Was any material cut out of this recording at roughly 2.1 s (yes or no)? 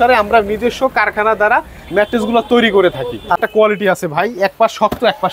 no